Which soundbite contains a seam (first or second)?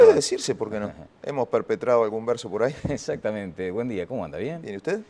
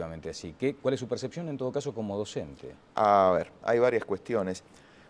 second